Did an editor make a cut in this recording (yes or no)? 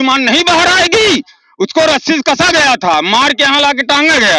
no